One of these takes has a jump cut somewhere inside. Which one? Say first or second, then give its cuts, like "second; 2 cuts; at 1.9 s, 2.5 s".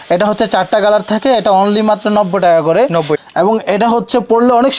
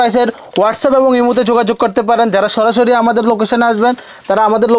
first; 1 cut; at 3.2 s